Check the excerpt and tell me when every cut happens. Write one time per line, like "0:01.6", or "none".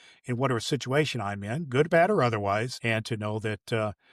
0:02.8

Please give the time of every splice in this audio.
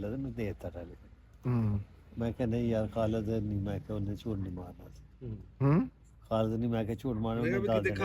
none

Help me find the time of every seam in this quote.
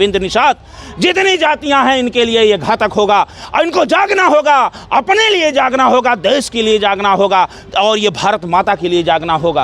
none

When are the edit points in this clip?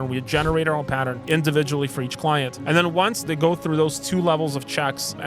0:01.2
0:03.2

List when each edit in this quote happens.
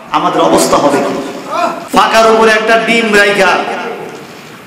0:01.8

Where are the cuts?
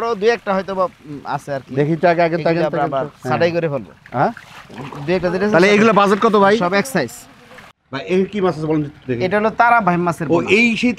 0:07.9

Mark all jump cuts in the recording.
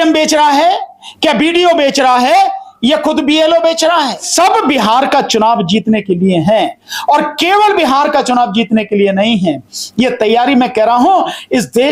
0:04.3

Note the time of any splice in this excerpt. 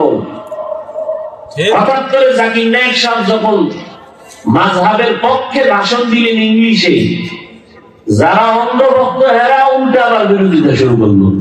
none

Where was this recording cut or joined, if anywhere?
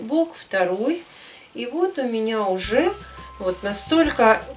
0:03.2

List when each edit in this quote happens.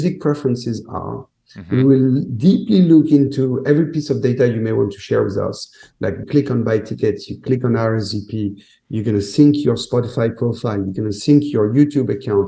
0:06.2

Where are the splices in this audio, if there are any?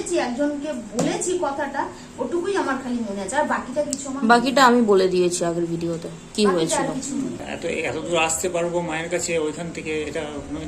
0:07.5

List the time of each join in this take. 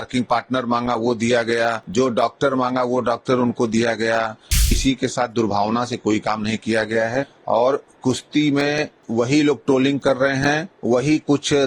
0:01.8
0:04.8
0:07.4
0:09.0
0:10.7

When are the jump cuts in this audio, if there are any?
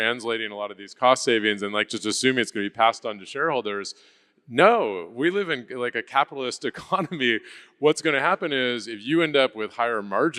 none

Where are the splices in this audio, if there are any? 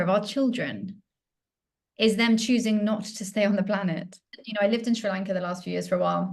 0:04.4

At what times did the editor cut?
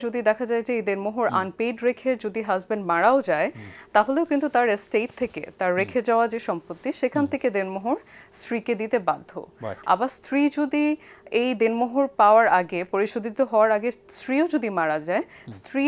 none

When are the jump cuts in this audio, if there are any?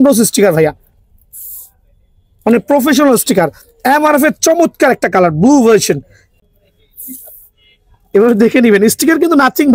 0:06.3

